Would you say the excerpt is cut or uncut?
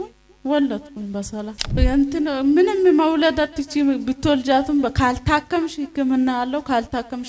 cut